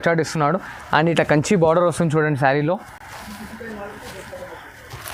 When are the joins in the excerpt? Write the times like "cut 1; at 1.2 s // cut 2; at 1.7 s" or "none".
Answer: none